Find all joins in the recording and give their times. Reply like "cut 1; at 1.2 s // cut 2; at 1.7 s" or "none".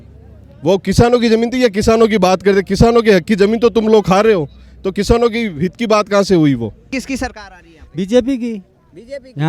cut 1; at 7.0 s